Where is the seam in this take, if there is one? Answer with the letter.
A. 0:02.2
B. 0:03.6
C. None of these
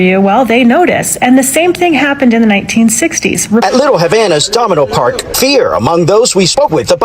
B